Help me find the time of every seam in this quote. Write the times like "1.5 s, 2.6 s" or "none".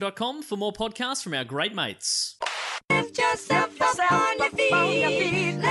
2.8 s

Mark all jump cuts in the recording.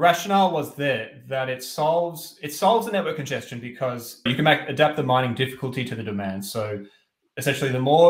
4.3 s

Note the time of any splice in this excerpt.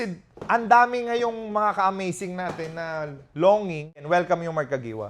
4.0 s

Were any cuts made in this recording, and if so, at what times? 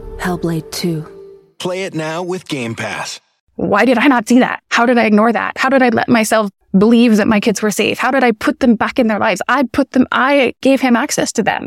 3.4 s, 4.6 s, 6.6 s, 10.6 s

